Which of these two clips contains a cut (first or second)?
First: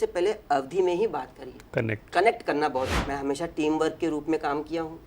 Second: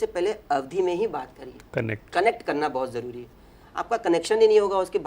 first